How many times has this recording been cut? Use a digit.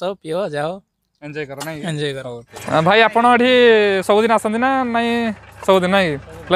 1